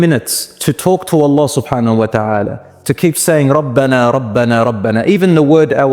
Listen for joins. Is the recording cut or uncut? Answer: uncut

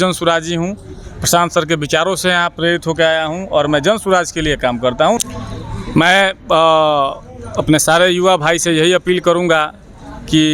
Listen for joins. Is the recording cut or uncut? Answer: cut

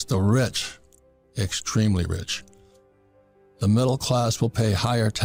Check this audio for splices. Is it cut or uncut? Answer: uncut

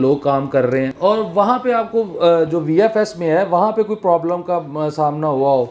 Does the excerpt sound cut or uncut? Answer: cut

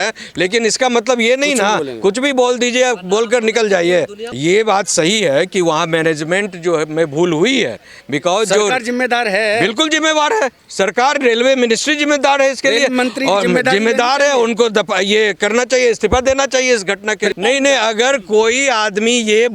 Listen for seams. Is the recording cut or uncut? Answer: cut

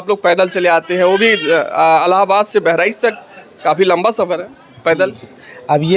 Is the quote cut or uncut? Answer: uncut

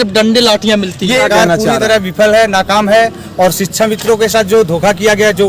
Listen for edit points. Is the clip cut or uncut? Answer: cut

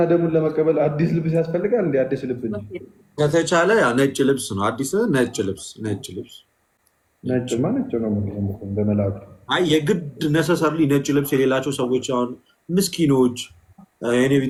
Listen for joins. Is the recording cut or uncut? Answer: uncut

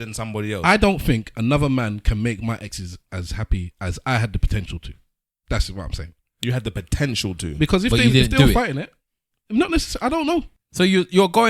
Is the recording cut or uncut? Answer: cut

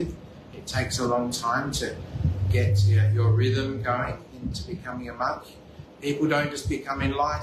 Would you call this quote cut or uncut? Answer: uncut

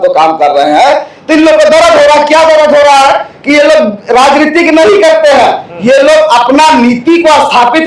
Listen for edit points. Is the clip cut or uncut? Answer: uncut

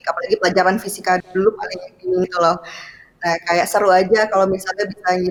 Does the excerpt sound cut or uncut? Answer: uncut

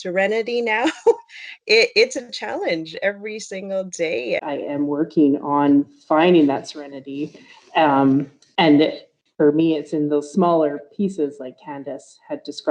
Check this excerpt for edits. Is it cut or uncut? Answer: cut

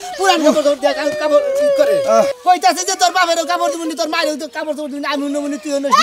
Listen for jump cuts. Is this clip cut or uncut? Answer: cut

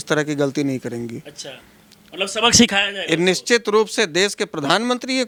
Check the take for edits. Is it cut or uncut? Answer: uncut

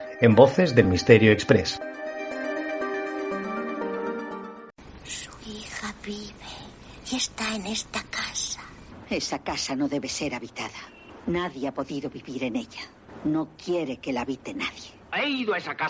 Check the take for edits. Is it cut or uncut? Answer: cut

